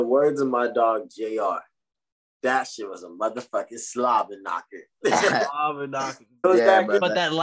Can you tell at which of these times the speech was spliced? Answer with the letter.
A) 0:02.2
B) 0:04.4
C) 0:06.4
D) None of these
C